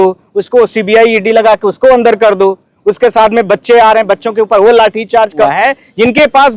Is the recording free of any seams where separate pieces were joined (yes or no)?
no